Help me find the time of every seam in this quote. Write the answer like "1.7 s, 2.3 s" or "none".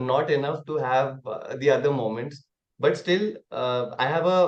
none